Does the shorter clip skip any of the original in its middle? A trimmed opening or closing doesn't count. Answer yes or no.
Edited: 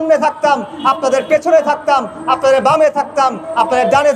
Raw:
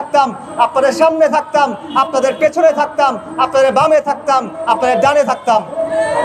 no